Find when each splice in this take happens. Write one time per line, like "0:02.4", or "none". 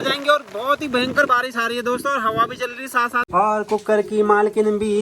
0:03.2